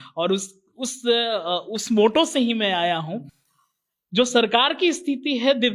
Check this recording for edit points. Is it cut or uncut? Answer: uncut